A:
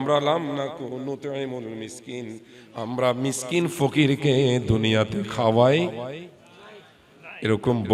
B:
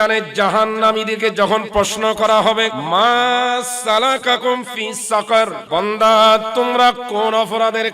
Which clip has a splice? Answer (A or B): B